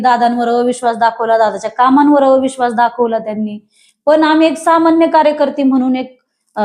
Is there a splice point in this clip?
no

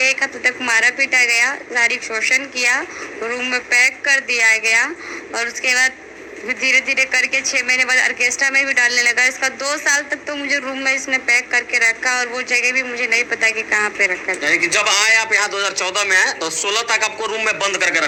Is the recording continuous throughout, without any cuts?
yes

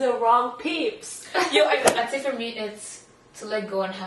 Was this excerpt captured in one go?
no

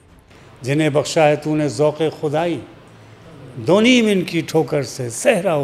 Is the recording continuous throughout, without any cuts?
yes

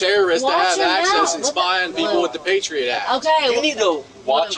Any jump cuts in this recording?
no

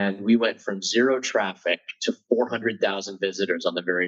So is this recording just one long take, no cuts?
yes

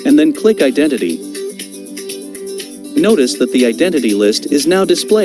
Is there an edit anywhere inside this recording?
no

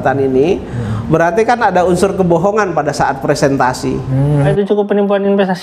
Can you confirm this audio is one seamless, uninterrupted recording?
no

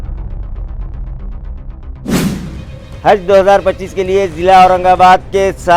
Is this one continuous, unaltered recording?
no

